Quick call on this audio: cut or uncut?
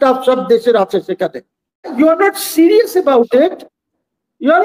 cut